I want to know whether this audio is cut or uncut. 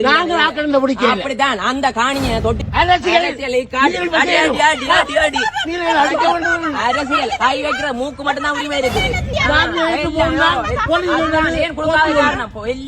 cut